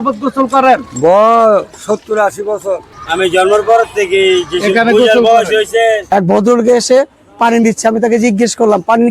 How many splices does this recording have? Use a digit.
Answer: 2